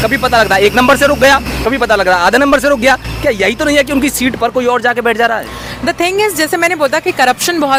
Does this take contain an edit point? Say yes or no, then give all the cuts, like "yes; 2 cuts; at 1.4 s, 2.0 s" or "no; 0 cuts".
no; 0 cuts